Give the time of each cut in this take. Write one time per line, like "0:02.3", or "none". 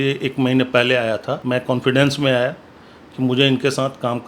0:01.4